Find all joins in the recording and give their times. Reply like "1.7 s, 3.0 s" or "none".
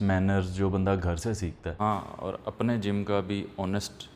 1.8 s